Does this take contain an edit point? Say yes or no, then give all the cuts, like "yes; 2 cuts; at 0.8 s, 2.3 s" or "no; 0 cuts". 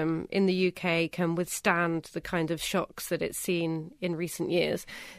no; 0 cuts